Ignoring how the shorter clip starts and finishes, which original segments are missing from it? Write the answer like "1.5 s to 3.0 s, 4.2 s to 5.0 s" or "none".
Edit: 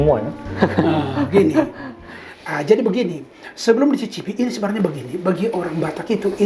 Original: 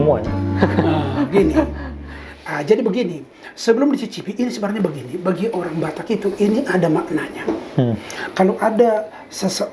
none